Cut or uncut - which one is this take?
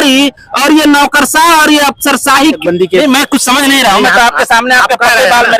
cut